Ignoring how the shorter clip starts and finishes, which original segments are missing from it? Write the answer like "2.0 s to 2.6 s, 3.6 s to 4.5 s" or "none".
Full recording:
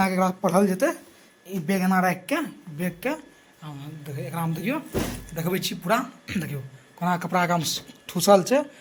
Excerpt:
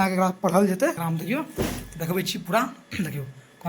1.0 s to 4.4 s

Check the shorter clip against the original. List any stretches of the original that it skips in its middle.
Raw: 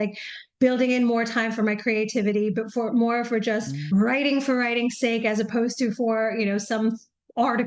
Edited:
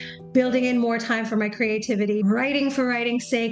2.5 s to 3.9 s

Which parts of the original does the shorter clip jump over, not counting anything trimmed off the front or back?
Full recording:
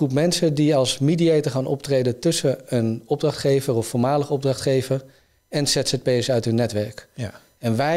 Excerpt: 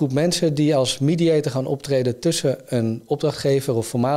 none

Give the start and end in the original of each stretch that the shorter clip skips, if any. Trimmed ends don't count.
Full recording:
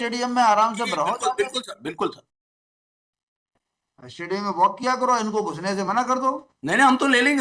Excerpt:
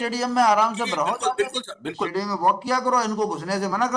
2.1 s to 4.3 s

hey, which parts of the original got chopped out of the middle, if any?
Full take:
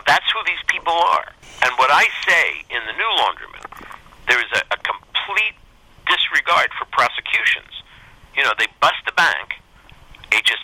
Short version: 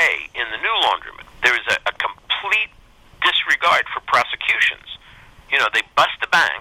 3.6 s to 4.0 s

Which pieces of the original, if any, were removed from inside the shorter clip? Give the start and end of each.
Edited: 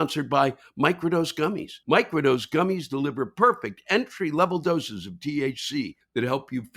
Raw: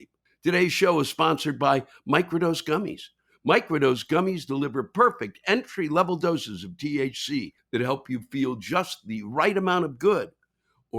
3.0 s to 3.3 s

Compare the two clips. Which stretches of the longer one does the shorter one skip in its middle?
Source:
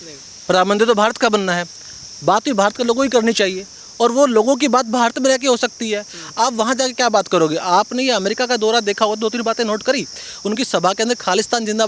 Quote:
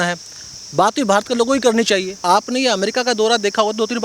3.7 s to 7.6 s

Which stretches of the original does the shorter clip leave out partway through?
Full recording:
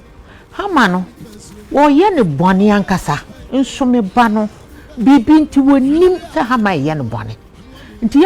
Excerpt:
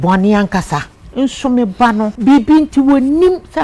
4.5 s to 4.9 s

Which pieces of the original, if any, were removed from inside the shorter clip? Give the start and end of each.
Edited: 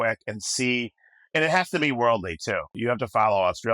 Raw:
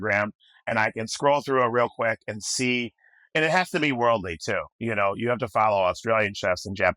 4.8 s to 5.2 s

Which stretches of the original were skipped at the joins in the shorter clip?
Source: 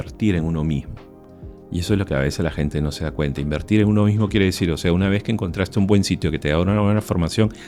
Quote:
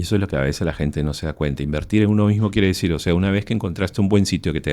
none

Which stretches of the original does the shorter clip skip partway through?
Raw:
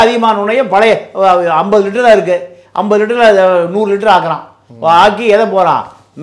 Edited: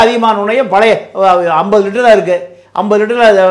none

